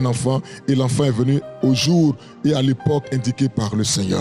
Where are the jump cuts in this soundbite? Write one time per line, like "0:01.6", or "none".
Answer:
none